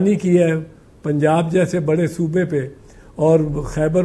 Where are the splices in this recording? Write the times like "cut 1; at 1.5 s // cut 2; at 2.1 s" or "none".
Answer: none